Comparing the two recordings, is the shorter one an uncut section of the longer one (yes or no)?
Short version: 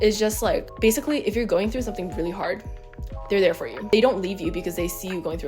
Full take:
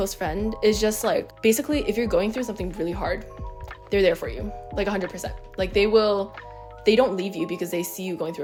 no